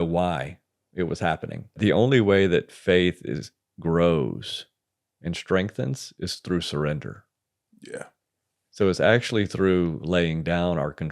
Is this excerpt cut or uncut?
cut